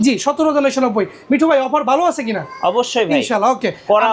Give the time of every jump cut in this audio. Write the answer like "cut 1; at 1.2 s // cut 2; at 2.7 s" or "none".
none